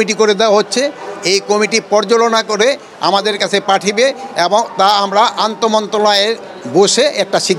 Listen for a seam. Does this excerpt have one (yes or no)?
no